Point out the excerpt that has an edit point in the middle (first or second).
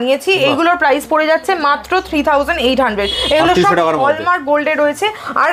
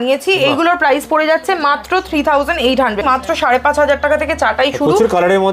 second